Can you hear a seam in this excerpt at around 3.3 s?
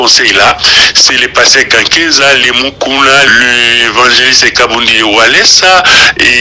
yes; 1 cut; at 3.3 s

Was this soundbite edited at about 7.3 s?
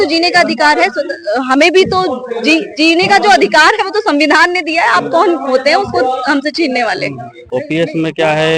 yes; 1 cut; at 7.3 s

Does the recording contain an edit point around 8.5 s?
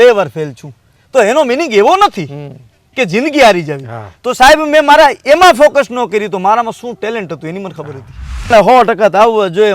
yes; 1 cut; at 8.5 s

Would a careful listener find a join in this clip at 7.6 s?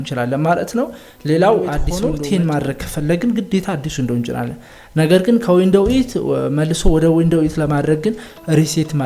no; 1 cut; at 1.9 s

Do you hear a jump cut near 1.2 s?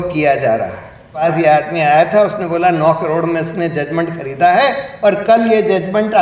yes; 1 cut; at 1.2 s

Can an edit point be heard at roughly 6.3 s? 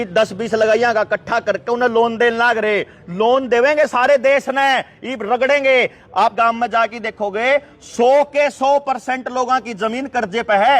yes; 1 cut; at 6.3 s

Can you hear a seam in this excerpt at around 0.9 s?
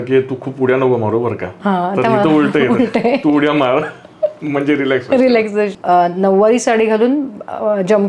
no; 1 cut; at 5.7 s

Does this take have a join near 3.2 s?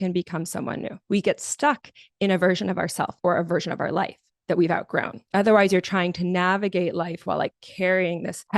no; 2 cuts; at 1.0 s, 5.2 s

